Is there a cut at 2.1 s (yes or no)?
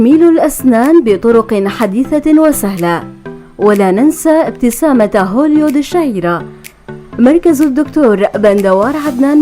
yes